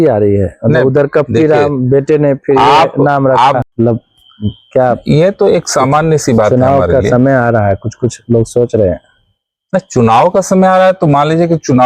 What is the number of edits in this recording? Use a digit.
1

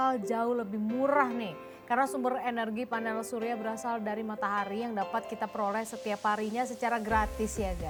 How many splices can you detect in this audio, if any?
0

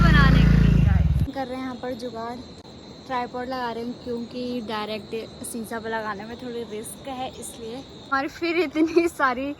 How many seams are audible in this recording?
2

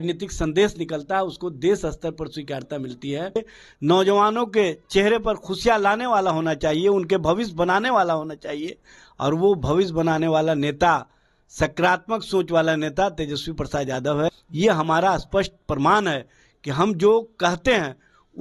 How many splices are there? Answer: 2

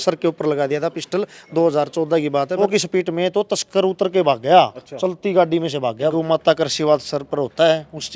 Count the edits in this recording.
2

